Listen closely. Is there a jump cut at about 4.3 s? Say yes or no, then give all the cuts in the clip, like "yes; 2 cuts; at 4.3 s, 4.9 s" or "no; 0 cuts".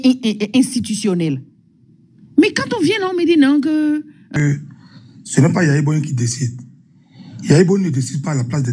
yes; 1 cut; at 4.3 s